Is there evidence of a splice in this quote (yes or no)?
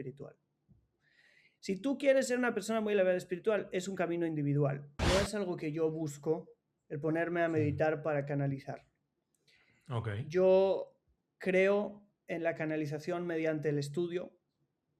yes